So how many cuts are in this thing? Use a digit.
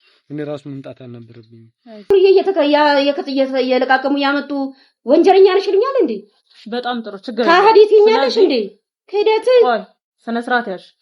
1